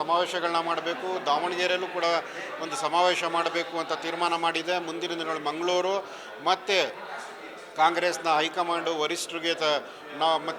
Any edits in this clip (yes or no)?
no